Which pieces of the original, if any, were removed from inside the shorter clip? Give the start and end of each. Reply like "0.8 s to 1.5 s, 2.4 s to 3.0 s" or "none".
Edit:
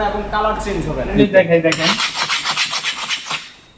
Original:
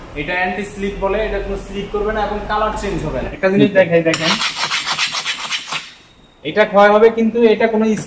3.3 s to 3.5 s